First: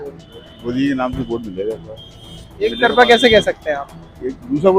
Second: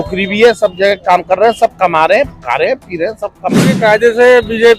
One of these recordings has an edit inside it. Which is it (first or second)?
second